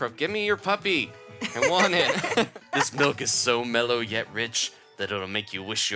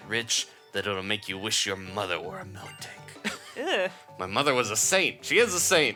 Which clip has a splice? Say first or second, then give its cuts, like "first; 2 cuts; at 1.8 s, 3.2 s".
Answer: first; 1 cut; at 2.7 s